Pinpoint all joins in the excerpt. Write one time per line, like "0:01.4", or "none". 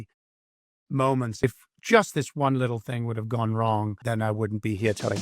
0:01.4
0:04.0